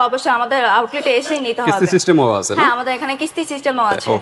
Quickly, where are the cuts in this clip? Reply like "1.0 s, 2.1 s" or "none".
none